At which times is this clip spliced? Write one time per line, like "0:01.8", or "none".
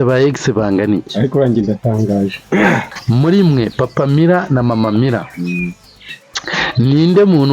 0:02.9

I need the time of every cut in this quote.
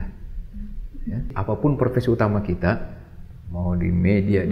0:01.3

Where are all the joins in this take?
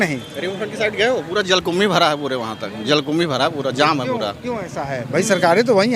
none

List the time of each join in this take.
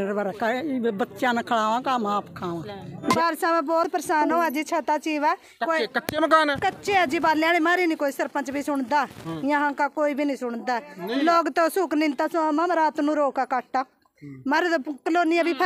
0:03.1

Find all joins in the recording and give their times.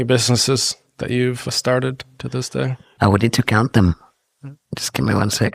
0:01.5
0:02.8
0:04.6

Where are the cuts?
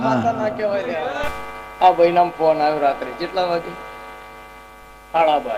0:01.0

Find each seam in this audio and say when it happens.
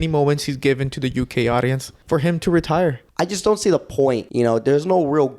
0:01.9
0:03.0
0:04.3

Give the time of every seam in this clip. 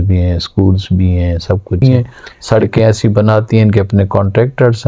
0:01.8

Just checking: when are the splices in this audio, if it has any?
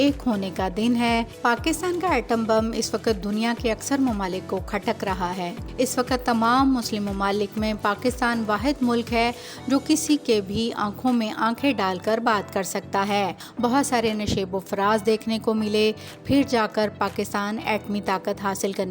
0:01.3
0:05.6
0:13.4

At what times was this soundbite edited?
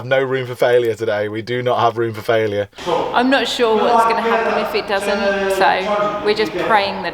0:02.8

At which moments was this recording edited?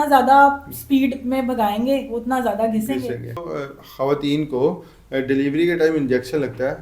0:03.5

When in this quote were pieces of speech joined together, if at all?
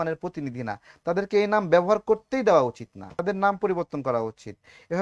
0:03.2

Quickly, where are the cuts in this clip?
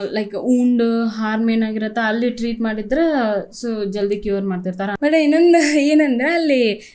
0:04.9

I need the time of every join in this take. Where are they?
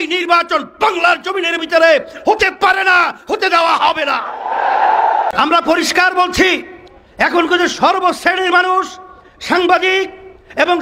0:05.3

